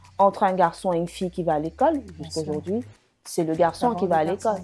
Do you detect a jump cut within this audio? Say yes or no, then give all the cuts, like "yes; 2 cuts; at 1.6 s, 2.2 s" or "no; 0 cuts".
no; 0 cuts